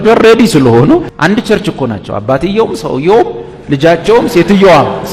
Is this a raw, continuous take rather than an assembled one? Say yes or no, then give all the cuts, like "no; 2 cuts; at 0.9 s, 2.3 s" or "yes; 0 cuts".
no; 1 cut; at 1.1 s